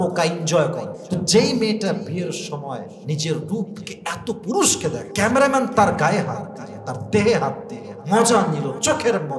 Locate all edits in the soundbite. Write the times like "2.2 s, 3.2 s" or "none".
0.9 s, 5.1 s